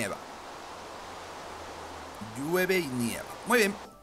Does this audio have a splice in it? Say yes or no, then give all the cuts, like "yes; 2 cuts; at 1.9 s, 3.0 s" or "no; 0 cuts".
no; 0 cuts